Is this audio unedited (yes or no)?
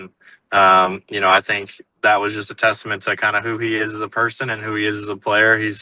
yes